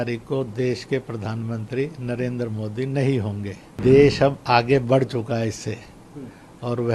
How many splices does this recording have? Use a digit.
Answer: 1